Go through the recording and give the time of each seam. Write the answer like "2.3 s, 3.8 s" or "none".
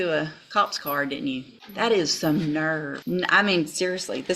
1.6 s, 2.9 s